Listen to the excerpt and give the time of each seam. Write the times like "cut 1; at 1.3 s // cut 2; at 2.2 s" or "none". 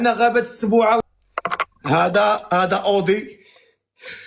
cut 1; at 1.0 s